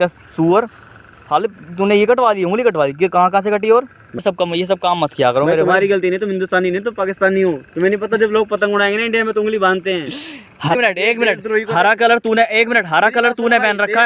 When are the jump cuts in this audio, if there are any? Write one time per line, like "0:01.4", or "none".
none